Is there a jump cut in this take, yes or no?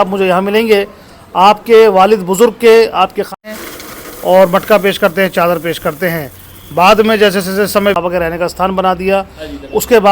yes